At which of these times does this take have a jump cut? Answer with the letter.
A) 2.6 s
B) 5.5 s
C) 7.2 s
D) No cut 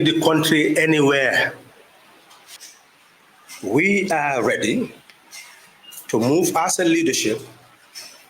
A